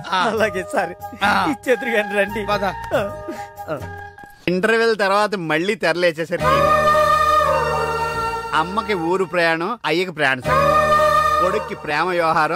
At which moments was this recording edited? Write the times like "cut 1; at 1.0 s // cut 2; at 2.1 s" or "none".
cut 1; at 4.5 s